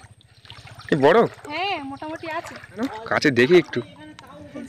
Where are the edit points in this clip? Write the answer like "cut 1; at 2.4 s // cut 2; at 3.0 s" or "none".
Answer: cut 1; at 2.8 s

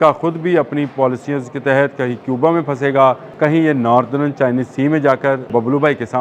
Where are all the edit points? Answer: cut 1; at 3.3 s // cut 2; at 5.5 s

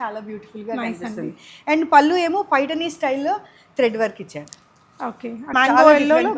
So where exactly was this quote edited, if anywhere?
cut 1; at 5.5 s

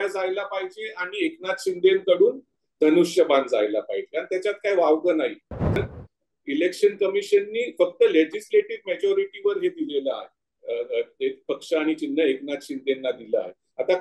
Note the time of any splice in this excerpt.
cut 1; at 5.8 s

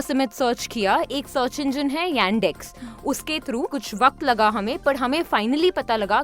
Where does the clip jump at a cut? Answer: cut 1; at 3.8 s

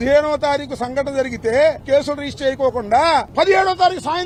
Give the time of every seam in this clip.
none

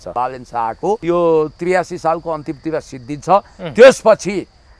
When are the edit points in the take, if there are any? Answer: cut 1; at 1.0 s

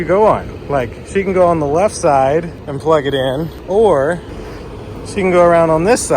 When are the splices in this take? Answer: cut 1; at 3.5 s

